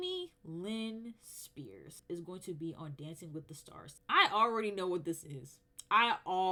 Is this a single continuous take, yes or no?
yes